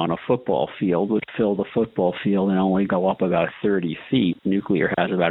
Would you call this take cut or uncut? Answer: cut